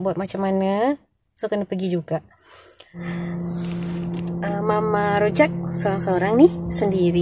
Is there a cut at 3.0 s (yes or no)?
yes